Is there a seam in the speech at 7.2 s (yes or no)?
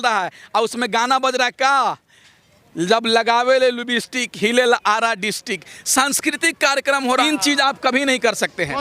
yes